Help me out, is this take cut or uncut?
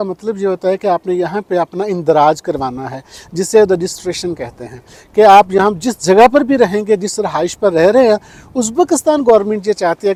uncut